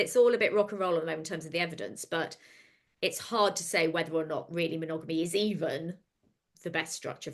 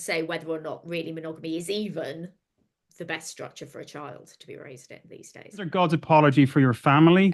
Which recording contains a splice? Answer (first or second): second